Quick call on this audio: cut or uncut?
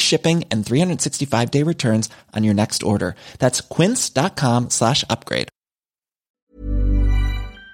cut